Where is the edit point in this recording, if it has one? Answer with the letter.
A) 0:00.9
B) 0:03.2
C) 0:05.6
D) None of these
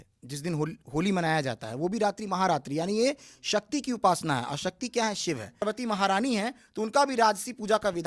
C